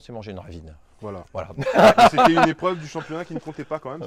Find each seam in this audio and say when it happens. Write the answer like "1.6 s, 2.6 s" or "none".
none